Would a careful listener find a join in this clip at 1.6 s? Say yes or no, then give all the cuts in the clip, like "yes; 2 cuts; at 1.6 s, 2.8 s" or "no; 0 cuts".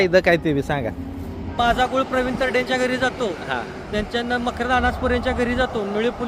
yes; 1 cut; at 1.6 s